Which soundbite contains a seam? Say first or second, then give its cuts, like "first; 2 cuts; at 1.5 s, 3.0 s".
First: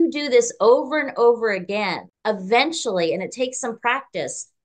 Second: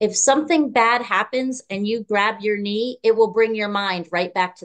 first; 1 cut; at 2.1 s